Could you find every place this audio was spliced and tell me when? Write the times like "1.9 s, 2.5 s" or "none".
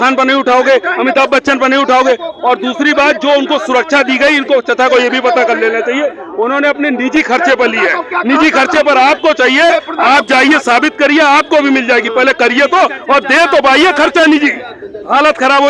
none